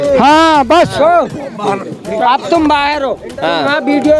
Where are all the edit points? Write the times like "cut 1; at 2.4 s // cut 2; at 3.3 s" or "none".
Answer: none

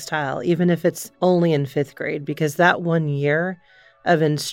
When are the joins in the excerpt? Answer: cut 1; at 1.1 s

